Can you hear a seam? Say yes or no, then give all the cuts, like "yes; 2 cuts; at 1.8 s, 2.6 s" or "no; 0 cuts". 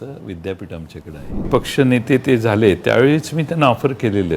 yes; 1 cut; at 1.5 s